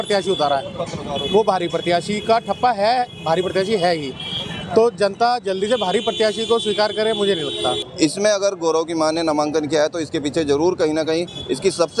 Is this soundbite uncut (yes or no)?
no